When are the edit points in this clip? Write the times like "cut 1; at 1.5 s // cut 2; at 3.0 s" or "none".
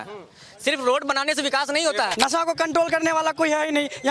cut 1; at 2.1 s